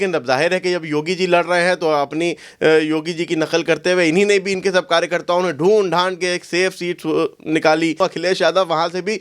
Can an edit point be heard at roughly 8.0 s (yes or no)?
yes